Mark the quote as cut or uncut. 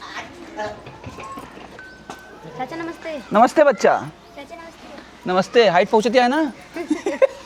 uncut